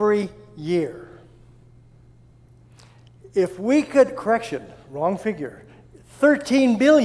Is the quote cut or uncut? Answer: uncut